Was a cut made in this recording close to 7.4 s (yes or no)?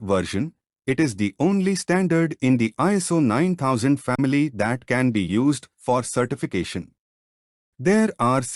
no